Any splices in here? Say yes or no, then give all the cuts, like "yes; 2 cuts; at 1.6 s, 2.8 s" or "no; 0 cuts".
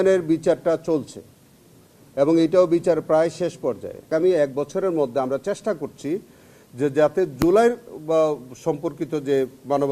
yes; 1 cut; at 4.1 s